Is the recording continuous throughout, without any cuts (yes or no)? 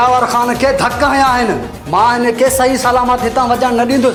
yes